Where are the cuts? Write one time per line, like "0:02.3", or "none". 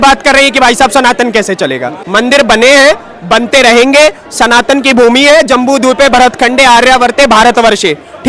0:01.9